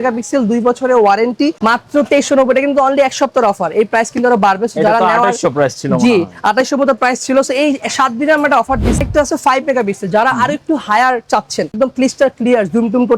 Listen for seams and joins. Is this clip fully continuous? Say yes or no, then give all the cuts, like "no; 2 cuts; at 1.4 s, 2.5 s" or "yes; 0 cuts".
no; 3 cuts; at 1.6 s, 9.0 s, 11.7 s